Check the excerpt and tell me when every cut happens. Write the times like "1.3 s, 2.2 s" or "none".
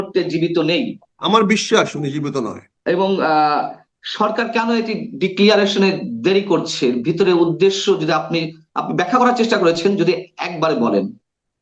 1.0 s, 2.6 s